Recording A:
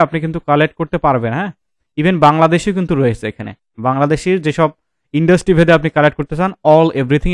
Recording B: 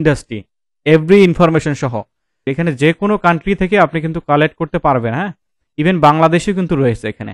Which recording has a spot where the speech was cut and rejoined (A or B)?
B